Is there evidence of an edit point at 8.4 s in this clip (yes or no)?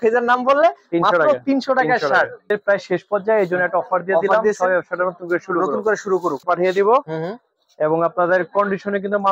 no